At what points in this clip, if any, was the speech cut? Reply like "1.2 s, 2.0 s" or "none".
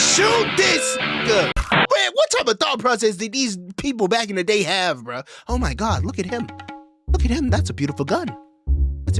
1.8 s